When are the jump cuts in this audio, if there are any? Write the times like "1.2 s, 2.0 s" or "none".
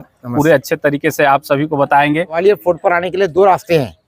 2.4 s